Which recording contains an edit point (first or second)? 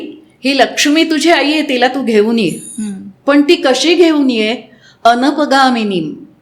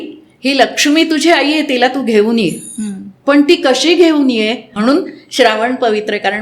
second